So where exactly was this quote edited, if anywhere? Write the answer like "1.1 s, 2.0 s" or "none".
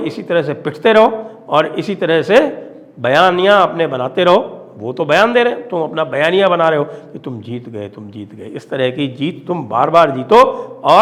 none